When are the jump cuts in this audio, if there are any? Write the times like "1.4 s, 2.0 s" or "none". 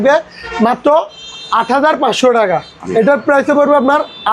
2.8 s